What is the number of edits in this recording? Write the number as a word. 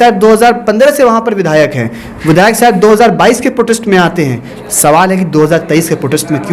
zero